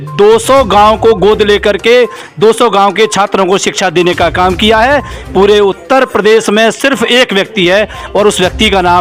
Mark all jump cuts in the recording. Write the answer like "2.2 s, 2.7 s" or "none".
none